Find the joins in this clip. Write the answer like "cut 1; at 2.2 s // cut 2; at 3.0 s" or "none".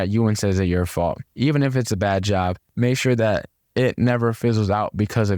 cut 1; at 1.3 s